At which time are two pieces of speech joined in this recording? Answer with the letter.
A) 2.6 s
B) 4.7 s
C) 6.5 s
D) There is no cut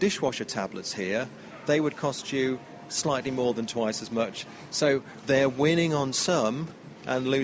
B